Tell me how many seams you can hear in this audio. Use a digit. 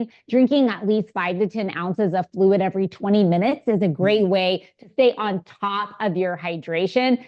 0